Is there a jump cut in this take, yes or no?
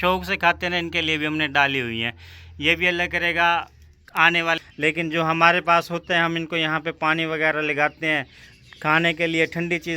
yes